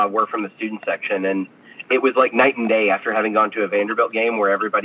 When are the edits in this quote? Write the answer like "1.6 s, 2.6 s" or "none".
none